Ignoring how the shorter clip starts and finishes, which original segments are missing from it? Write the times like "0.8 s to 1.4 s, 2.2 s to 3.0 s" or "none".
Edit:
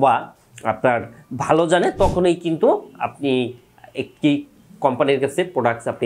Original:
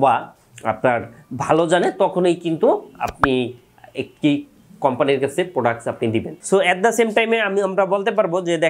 none